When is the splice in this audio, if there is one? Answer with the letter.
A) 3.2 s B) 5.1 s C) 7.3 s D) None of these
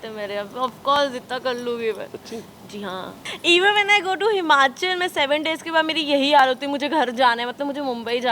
A